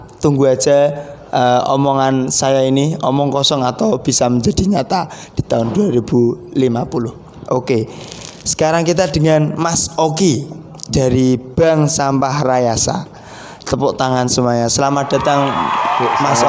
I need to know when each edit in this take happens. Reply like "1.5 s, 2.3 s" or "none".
none

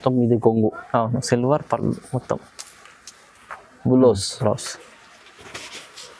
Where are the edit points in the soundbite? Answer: none

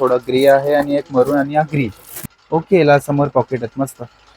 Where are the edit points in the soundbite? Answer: 2.1 s

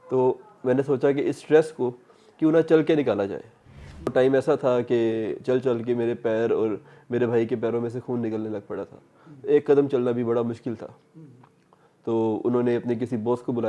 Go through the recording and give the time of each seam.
4.1 s

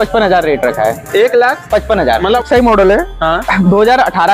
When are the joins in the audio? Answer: 2.4 s

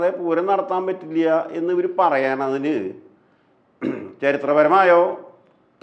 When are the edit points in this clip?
none

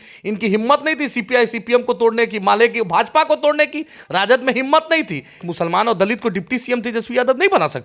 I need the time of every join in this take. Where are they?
5.3 s

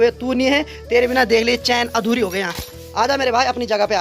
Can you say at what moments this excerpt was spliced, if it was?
none

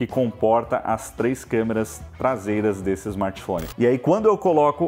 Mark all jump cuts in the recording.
3.7 s

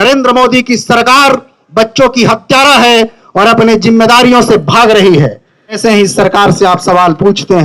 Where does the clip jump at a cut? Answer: 5.8 s

